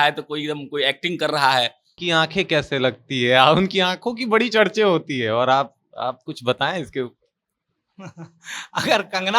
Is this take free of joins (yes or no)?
no